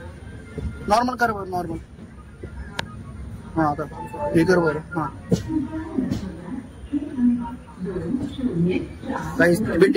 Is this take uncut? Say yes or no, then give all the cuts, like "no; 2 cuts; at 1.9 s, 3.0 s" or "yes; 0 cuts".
yes; 0 cuts